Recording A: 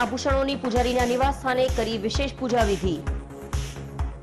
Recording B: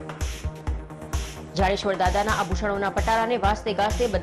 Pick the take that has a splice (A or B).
B